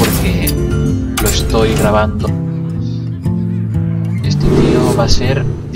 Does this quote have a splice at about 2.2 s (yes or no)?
no